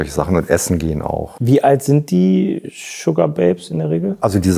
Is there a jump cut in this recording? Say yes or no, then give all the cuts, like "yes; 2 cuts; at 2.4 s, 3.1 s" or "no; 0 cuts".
no; 0 cuts